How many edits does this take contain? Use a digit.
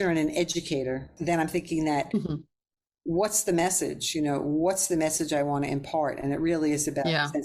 1